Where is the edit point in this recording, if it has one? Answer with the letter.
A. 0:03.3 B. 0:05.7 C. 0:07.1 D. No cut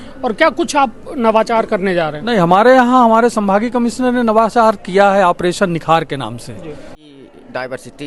C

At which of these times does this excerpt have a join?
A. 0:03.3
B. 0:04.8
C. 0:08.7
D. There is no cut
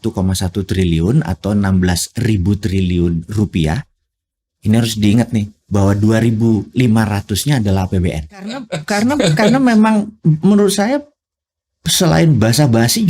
C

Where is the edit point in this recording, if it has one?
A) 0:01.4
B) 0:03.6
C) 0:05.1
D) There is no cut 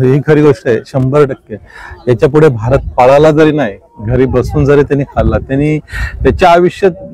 D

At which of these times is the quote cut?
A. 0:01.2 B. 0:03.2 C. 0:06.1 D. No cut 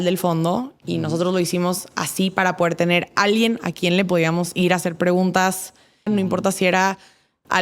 C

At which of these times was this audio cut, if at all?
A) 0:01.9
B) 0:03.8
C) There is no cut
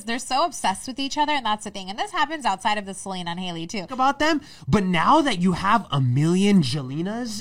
B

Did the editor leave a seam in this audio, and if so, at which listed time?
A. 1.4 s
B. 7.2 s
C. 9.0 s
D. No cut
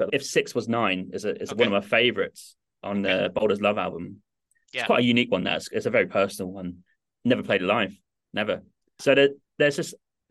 C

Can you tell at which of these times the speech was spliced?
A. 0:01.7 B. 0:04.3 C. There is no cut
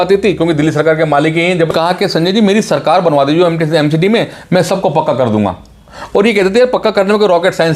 A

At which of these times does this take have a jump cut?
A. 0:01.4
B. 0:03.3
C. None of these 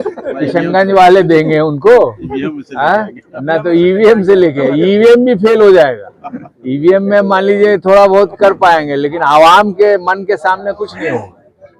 C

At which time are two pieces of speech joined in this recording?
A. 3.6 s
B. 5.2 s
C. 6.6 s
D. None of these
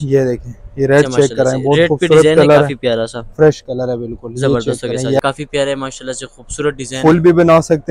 B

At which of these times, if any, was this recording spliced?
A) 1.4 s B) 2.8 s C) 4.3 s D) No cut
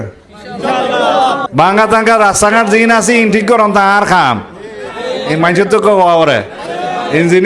A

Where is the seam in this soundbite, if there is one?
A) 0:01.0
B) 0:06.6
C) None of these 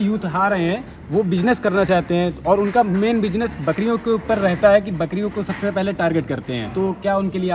B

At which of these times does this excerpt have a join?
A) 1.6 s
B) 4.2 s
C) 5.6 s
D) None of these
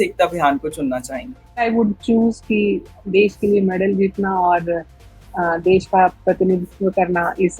A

